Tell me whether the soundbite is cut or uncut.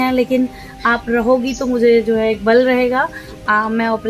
uncut